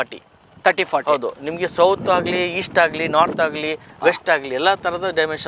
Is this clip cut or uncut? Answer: uncut